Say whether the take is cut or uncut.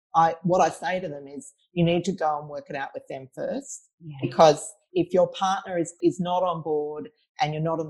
cut